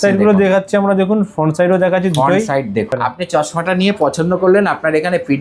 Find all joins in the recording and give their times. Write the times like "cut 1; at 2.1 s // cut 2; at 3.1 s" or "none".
cut 1; at 2.9 s